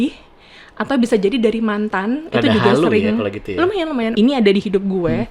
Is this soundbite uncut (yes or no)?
no